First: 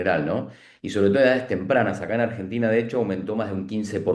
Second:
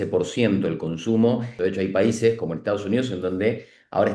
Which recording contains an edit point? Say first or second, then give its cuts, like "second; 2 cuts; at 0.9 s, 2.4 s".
second; 1 cut; at 1.5 s